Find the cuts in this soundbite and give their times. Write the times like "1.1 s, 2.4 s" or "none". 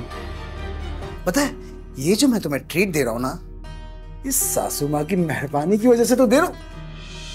1.0 s